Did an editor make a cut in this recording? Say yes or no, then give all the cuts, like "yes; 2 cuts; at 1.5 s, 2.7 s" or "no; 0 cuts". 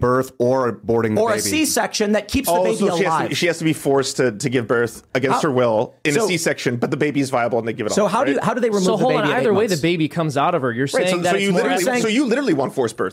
no; 0 cuts